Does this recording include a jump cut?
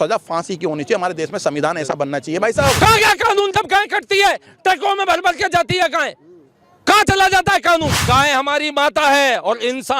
yes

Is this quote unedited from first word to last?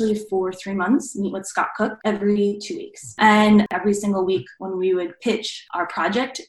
no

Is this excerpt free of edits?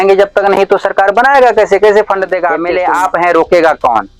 no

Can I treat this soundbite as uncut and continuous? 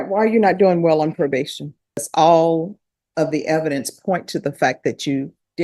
no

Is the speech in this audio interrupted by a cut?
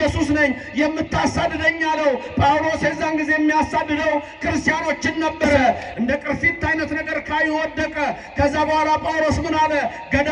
yes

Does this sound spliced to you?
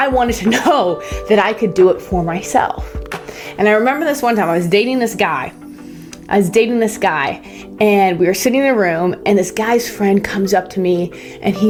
no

